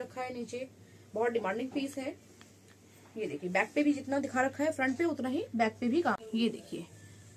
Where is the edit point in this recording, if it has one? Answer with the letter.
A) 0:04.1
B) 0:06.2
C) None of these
B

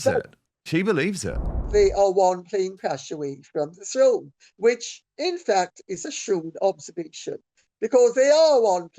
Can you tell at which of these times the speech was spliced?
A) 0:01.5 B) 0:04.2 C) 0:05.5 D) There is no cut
A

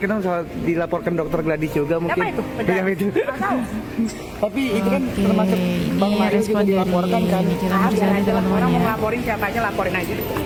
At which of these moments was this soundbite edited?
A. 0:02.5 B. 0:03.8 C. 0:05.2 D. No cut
D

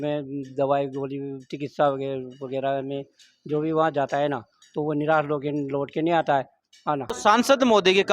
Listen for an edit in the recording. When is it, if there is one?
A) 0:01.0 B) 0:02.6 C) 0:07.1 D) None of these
C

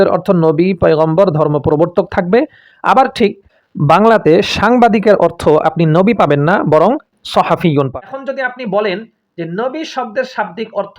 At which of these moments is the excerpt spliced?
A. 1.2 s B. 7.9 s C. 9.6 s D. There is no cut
B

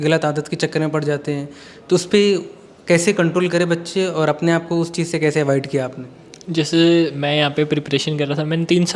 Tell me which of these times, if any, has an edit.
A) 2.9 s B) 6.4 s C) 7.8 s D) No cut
D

